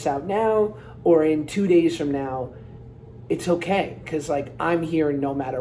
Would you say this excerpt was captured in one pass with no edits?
yes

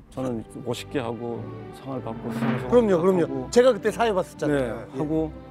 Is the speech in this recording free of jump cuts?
yes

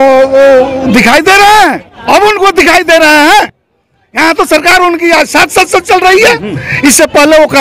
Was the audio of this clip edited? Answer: yes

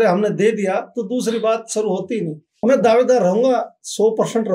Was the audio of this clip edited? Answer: yes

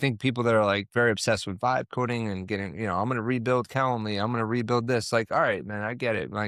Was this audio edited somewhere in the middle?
no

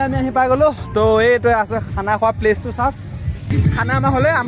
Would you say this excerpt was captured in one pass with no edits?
no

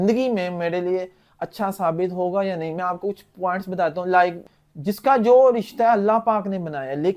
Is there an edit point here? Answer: yes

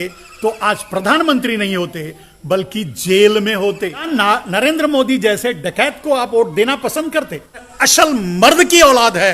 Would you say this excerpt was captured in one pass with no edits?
no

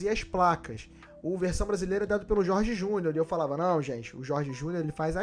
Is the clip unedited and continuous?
no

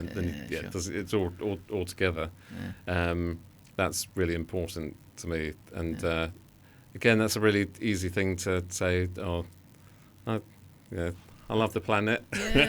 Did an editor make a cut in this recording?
no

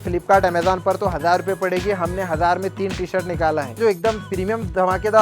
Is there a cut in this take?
yes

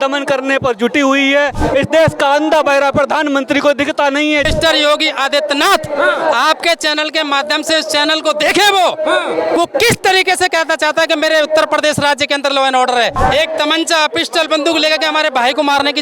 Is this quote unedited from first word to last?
no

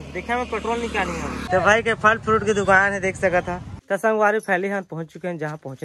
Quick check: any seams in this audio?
yes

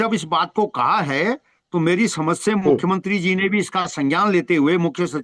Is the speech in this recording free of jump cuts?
yes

